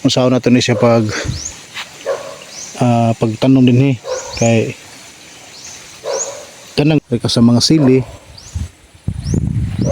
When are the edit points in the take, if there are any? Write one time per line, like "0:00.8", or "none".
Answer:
0:07.0

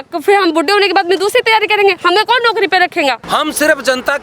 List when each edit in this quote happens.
0:03.2

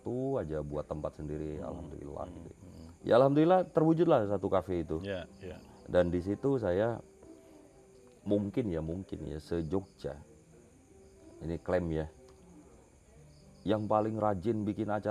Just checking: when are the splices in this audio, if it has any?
none

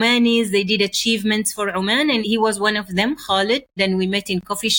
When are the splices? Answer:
0:02.2
0:03.7

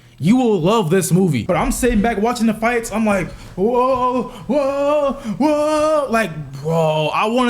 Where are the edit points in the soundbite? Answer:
0:01.4

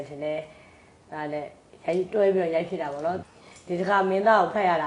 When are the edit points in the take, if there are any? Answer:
0:03.2

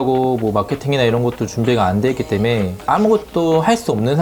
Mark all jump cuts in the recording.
none

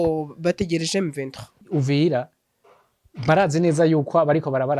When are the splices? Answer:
0:01.6

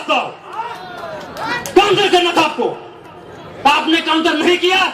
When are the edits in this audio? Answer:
none

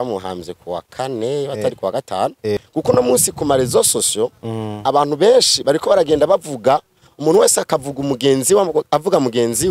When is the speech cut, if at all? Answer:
0:02.6

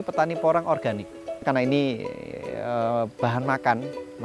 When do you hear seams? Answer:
0:01.4

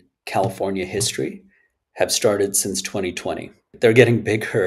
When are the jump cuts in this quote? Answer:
0:03.7

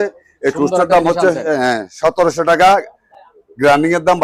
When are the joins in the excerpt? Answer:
none

